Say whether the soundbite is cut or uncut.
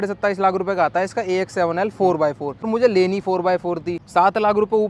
cut